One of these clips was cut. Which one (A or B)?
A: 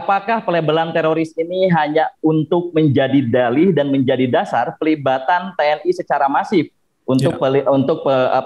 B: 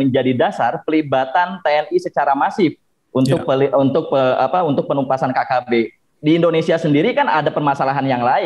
B